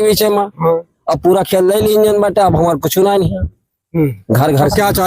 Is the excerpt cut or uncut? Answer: uncut